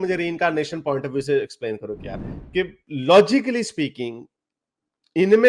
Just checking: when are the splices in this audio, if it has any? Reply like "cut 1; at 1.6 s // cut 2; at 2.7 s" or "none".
cut 1; at 2.2 s